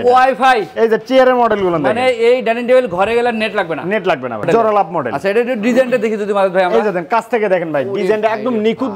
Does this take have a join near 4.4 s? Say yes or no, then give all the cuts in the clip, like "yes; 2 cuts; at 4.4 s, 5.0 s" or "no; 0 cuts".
yes; 1 cut; at 4.4 s